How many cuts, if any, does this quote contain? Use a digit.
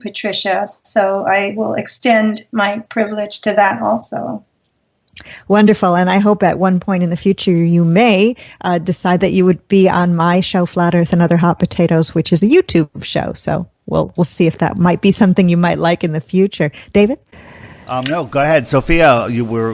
1